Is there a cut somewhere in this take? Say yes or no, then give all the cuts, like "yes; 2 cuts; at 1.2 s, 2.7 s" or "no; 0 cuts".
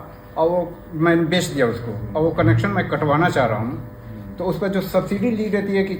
no; 0 cuts